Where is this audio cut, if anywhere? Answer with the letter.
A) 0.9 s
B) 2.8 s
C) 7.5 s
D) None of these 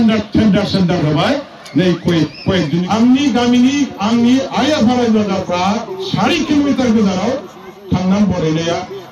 B